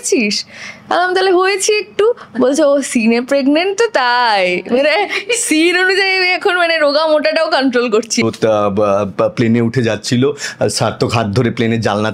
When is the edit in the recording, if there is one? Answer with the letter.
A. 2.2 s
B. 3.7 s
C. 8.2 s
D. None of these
C